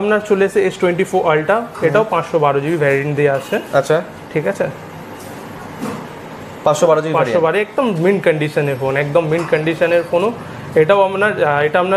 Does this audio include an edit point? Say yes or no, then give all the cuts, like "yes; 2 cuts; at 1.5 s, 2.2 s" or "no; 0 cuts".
no; 0 cuts